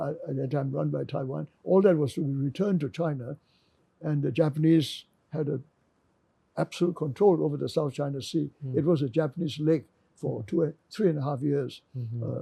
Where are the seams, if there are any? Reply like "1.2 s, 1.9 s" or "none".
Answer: none